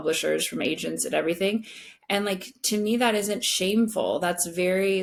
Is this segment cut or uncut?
uncut